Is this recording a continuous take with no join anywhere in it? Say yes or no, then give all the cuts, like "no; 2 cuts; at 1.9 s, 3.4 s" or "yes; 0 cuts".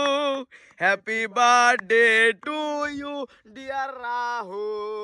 yes; 0 cuts